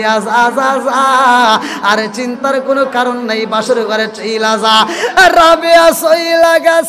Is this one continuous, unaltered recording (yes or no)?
yes